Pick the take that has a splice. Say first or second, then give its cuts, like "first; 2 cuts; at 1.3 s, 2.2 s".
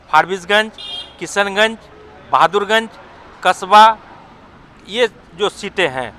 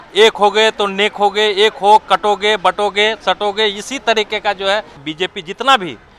second; 1 cut; at 5.0 s